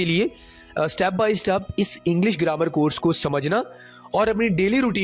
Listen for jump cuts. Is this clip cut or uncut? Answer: uncut